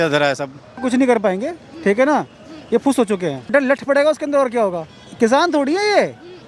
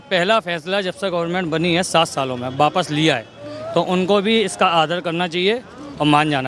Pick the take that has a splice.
first; 3 cuts; at 0.8 s, 3.5 s, 4.8 s

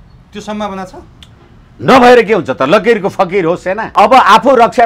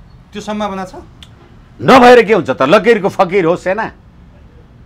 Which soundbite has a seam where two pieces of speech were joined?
first; 1 cut; at 3.9 s

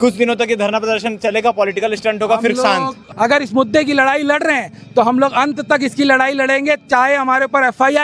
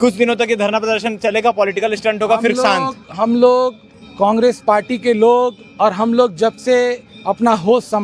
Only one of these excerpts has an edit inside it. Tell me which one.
first; 1 cut; at 3.0 s

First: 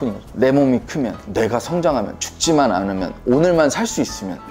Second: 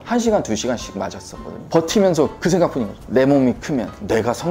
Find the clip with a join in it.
second; 1 cut; at 1.7 s

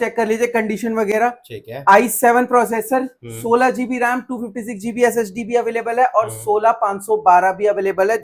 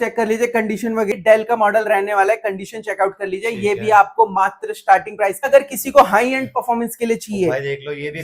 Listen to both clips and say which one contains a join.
second; 2 cuts; at 1.2 s, 5.5 s

